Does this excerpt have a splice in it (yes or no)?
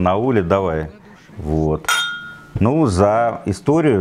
no